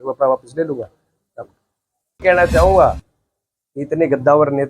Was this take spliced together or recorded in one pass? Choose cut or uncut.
cut